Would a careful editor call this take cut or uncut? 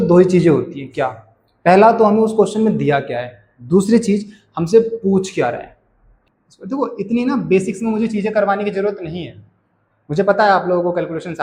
cut